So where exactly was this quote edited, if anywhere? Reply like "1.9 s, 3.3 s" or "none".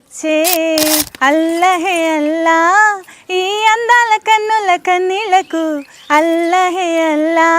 1.1 s